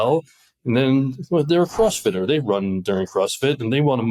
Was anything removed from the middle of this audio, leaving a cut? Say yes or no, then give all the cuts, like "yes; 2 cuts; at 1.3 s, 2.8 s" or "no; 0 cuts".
no; 0 cuts